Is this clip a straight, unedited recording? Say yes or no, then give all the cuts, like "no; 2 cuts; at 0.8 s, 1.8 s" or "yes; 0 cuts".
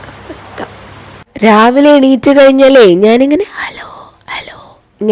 no; 1 cut; at 1.1 s